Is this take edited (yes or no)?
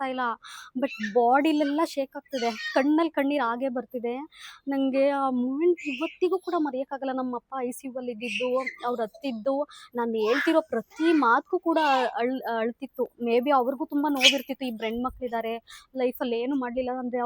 no